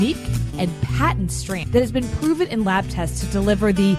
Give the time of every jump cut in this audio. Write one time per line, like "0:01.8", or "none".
0:01.6